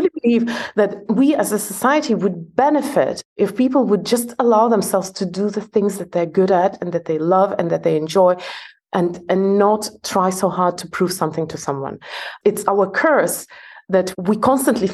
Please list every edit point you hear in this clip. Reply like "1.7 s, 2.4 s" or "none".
1.0 s, 12.3 s, 14.1 s

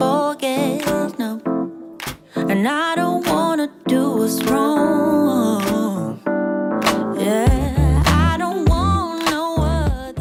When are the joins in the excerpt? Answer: none

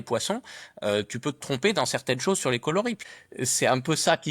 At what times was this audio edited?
3.0 s

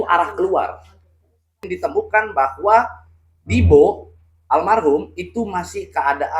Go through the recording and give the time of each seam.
1.7 s

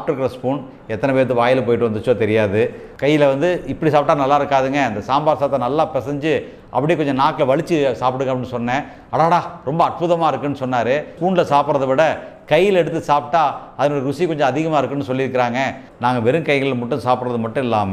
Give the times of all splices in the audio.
2.9 s, 11.1 s, 15.8 s

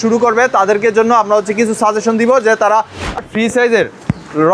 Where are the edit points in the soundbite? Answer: 3.2 s

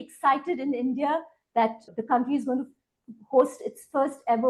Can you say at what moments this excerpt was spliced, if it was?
1.9 s

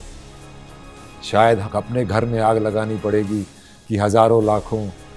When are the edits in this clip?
1.7 s

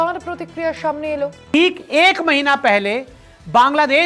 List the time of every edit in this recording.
1.5 s

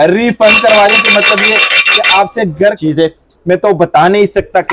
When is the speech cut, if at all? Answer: 2.8 s

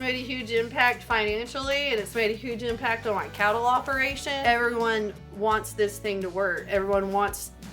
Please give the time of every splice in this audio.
4.4 s, 6.6 s

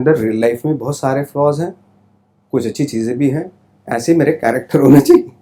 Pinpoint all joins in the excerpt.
none

